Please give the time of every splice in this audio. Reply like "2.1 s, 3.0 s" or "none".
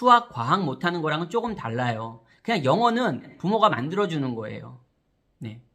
3.3 s

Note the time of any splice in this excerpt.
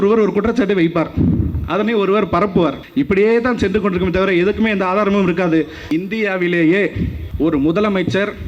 2.8 s, 5.8 s, 7.2 s

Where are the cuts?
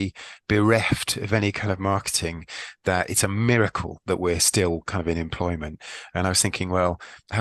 none

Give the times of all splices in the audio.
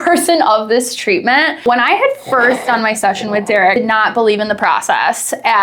1.6 s, 3.6 s

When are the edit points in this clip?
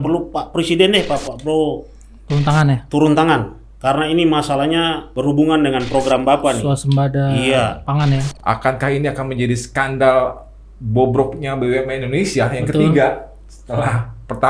5.1 s, 8.3 s

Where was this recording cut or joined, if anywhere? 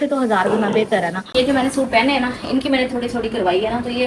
1.3 s

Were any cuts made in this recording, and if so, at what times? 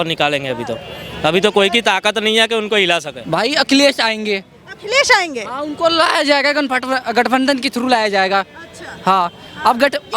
3.1 s

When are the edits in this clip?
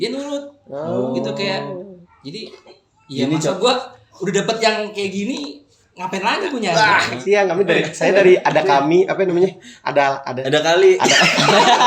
7.1 s

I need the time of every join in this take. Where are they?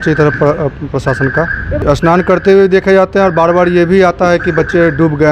1.8 s

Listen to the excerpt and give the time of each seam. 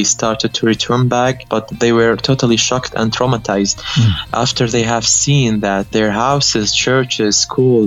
1.4 s, 5.9 s

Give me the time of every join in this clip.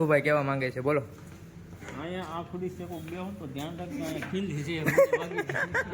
none

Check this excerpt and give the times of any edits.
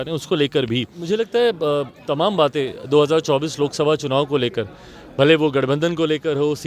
1.0 s

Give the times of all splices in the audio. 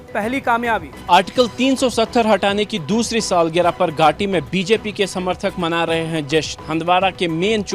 0.9 s

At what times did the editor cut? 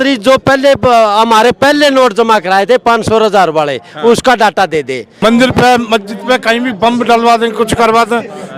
5.0 s

